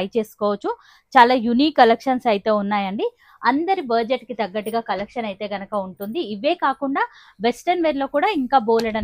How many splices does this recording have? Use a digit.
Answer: 0